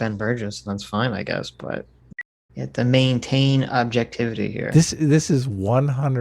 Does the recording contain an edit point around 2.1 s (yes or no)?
yes